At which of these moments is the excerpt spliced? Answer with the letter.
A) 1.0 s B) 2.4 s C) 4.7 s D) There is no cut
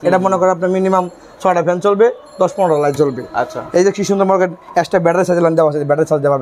D